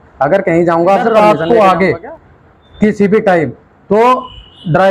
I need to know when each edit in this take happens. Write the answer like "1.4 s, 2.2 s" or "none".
1.1 s